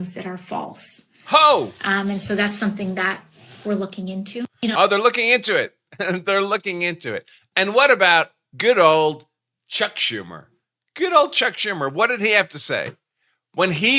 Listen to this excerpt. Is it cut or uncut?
uncut